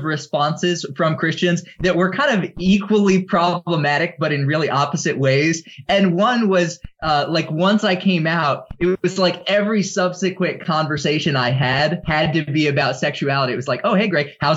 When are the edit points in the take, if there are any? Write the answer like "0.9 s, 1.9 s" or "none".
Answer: 12.0 s